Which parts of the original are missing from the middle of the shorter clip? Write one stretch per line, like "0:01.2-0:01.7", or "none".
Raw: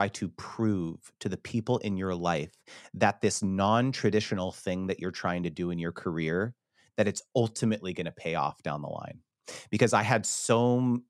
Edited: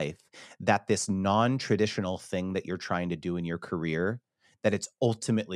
none